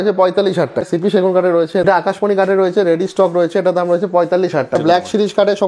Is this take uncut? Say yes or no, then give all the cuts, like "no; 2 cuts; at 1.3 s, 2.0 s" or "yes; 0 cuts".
no; 3 cuts; at 0.9 s, 1.9 s, 4.8 s